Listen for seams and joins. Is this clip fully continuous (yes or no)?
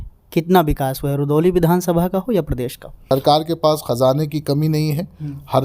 no